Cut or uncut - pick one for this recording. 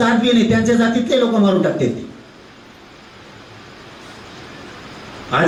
uncut